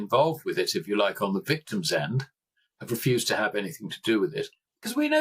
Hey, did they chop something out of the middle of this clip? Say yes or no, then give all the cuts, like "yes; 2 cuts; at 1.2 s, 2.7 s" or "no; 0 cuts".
no; 0 cuts